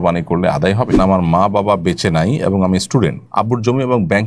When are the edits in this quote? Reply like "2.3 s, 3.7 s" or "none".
0.9 s, 3.2 s